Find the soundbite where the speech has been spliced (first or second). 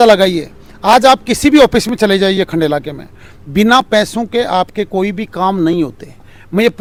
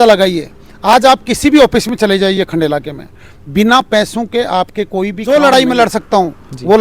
second